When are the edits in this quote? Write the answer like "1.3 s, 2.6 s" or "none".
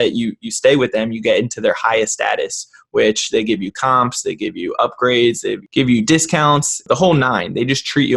none